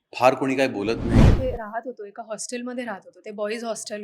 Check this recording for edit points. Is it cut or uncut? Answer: cut